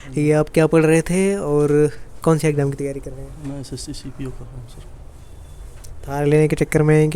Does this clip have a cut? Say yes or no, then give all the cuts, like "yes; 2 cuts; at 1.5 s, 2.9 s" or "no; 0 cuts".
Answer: no; 0 cuts